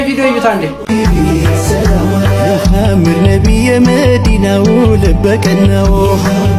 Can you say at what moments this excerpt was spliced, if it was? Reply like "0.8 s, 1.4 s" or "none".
none